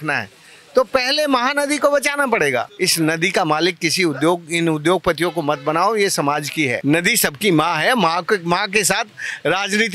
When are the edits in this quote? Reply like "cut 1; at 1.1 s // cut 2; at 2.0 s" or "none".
cut 1; at 2.7 s // cut 2; at 6.8 s